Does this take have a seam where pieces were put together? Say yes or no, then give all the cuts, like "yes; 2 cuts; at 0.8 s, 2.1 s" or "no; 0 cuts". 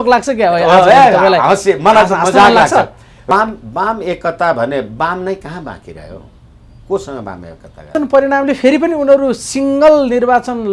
yes; 2 cuts; at 3.2 s, 7.9 s